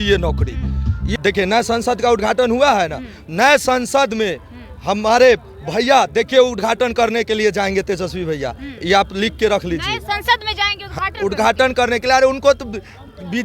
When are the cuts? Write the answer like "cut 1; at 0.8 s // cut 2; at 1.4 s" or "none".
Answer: cut 1; at 1.1 s